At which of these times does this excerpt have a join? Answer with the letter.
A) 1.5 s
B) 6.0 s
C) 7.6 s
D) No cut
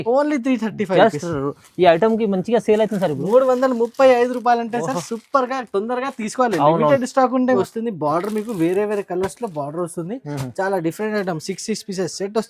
C